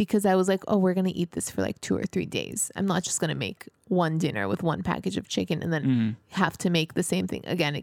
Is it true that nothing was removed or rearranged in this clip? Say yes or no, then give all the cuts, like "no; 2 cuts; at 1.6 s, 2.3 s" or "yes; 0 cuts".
yes; 0 cuts